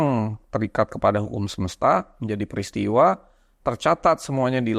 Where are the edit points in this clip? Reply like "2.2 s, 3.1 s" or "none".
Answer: none